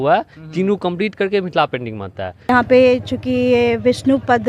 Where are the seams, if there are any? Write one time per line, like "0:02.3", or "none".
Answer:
0:02.5